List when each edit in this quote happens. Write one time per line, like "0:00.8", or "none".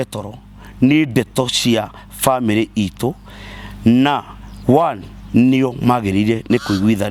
none